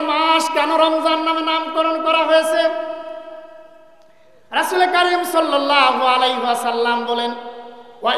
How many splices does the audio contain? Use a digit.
0